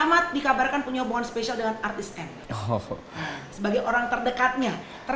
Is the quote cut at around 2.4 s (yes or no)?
yes